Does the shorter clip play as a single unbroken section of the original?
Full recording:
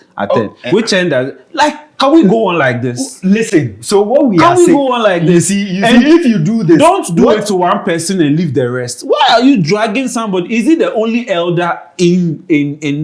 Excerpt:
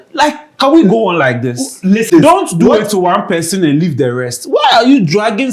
no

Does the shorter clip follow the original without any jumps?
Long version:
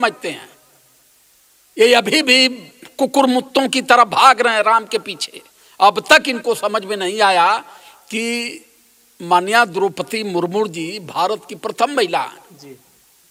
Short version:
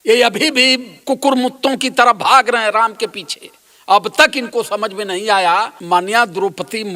no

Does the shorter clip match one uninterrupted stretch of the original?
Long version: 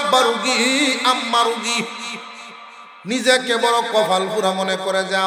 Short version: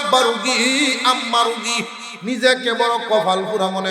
no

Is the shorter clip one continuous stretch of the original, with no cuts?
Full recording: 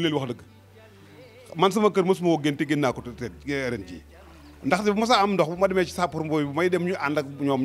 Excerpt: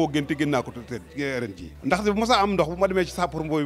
no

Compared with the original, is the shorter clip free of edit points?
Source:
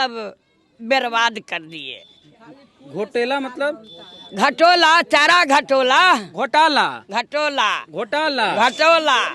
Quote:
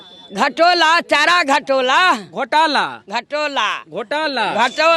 yes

